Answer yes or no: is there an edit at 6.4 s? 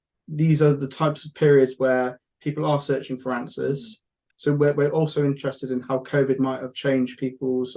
no